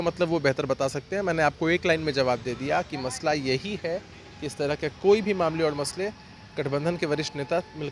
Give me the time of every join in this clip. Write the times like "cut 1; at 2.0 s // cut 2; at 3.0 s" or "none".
none